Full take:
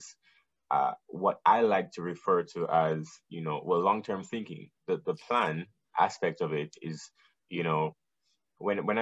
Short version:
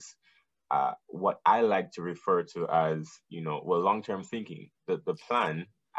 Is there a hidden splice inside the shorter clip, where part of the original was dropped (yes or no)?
no